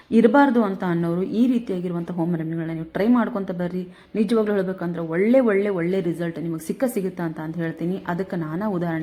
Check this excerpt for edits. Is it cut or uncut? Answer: uncut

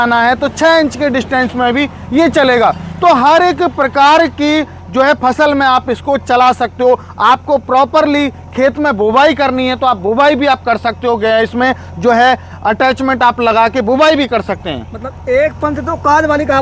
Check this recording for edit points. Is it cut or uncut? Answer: uncut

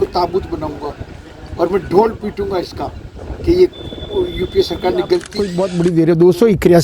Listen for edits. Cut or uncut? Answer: cut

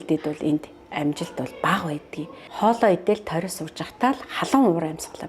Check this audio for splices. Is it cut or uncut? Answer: cut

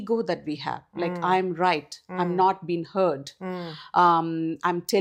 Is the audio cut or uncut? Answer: uncut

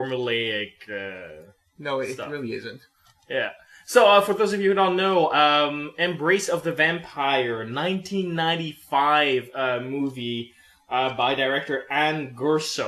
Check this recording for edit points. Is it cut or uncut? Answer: cut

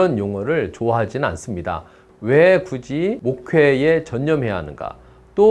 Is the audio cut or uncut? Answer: cut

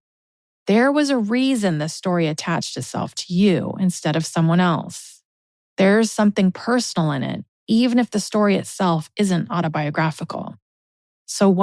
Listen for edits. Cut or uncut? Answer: uncut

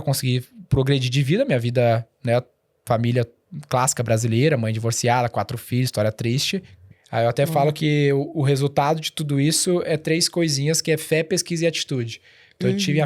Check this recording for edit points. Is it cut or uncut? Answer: cut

